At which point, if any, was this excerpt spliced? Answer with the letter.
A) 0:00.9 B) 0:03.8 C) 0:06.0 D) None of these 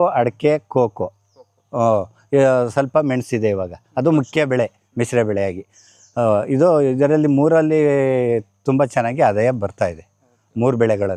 D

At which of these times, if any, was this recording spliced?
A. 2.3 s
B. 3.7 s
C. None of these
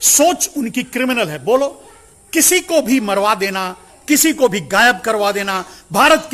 C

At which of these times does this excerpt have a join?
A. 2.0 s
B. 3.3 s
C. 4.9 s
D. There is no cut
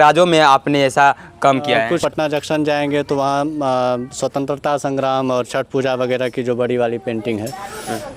A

